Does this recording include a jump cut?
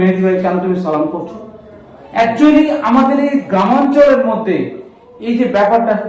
no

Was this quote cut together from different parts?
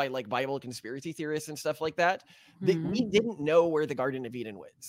no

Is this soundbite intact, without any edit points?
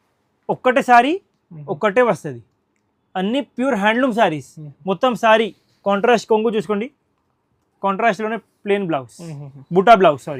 yes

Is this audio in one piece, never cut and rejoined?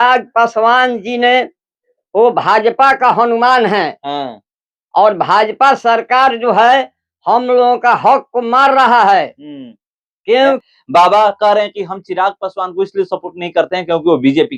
no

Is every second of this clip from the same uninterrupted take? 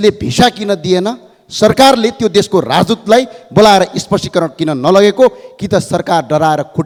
yes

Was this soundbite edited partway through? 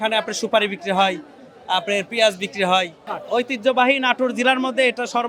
yes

